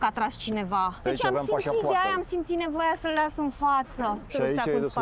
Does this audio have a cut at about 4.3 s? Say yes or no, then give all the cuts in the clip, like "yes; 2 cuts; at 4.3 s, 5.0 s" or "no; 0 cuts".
yes; 2 cuts; at 1.0 s, 4.3 s